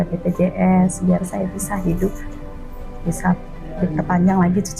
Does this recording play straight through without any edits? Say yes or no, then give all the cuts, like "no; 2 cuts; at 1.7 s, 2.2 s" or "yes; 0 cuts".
yes; 0 cuts